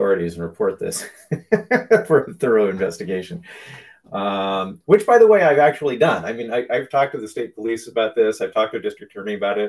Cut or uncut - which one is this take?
uncut